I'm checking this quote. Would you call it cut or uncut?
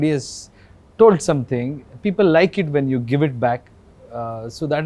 uncut